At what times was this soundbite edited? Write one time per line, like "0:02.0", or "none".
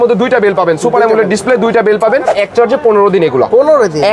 0:02.3